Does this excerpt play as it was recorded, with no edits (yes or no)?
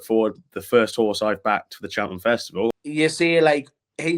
no